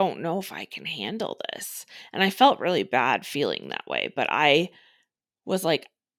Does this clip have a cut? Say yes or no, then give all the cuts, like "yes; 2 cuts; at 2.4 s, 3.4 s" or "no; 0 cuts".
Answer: no; 0 cuts